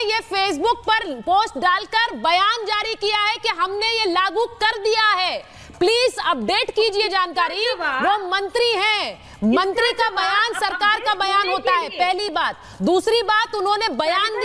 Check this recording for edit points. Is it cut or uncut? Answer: uncut